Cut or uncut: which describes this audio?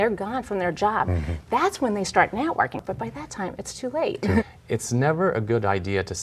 cut